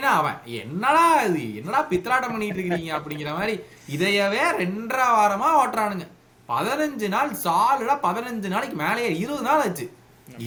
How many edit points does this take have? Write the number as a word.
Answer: zero